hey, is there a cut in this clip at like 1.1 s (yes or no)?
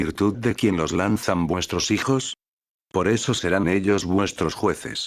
no